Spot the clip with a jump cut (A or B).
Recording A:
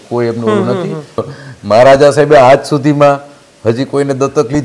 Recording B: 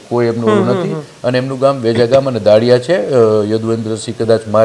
A